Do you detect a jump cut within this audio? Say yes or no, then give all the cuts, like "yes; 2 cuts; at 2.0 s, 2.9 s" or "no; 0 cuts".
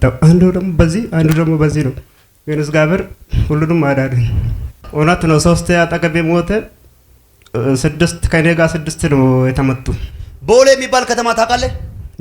yes; 1 cut; at 4.8 s